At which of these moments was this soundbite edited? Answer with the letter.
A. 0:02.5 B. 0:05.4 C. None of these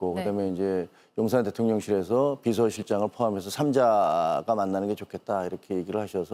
C